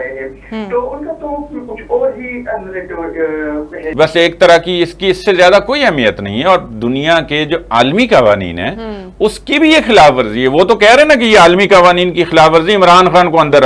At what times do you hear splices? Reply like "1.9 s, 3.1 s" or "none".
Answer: 3.8 s